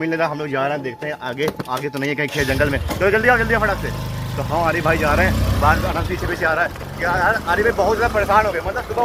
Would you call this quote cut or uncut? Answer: uncut